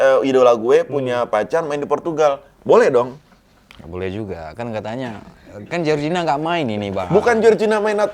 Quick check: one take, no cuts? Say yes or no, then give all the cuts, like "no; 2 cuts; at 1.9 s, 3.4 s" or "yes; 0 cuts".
yes; 0 cuts